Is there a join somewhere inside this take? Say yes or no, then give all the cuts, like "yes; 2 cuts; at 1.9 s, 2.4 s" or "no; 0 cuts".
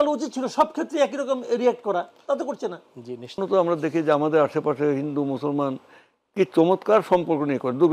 yes; 1 cut; at 3.4 s